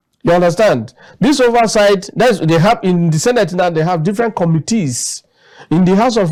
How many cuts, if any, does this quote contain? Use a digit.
0